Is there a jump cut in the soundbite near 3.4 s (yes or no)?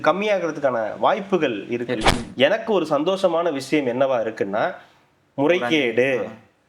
no